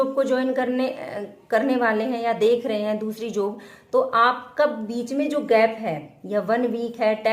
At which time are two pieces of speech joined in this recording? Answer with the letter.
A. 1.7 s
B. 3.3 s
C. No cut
B